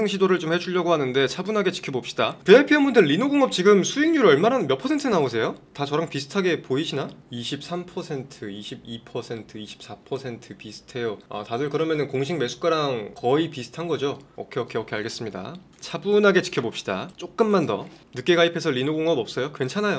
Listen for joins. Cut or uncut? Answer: cut